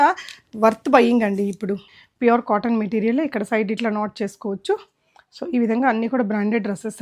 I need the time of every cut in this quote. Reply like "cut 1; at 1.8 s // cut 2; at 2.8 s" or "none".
cut 1; at 1.9 s